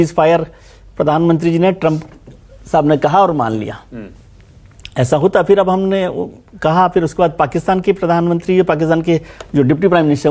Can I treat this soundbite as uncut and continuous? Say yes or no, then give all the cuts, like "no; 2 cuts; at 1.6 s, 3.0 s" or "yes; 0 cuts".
yes; 0 cuts